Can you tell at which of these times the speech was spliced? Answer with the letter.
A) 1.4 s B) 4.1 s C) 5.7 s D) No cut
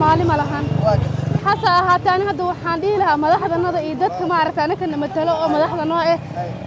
A